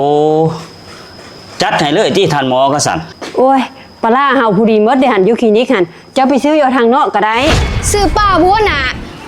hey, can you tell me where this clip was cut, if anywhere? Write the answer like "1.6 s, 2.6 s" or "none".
7.7 s